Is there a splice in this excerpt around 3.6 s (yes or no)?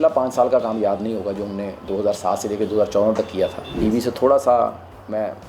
yes